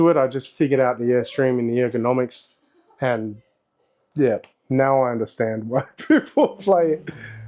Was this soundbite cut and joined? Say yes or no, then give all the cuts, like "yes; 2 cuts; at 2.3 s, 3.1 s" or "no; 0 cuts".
no; 0 cuts